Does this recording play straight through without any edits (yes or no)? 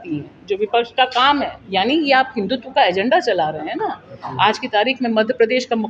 no